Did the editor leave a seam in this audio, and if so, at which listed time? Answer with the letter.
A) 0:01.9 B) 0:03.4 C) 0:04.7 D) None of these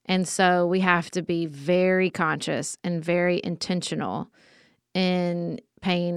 D